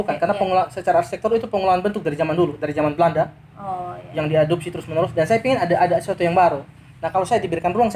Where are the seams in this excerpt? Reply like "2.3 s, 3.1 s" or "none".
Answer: none